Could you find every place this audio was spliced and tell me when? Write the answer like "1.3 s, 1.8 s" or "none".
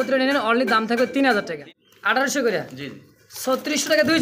1.6 s